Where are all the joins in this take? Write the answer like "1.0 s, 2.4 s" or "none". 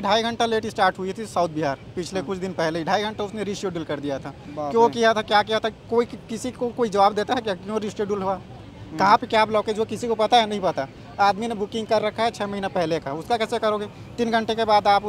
none